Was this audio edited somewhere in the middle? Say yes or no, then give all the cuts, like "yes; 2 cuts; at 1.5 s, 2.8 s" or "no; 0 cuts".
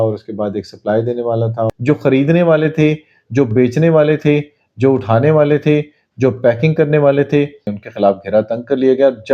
yes; 2 cuts; at 1.7 s, 7.7 s